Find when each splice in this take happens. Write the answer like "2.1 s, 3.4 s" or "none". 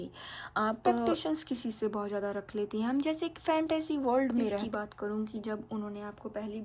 0.9 s, 4.7 s